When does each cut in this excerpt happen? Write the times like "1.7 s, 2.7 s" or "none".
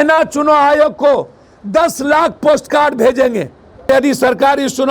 3.9 s